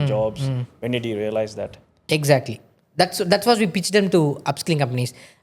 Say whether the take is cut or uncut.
cut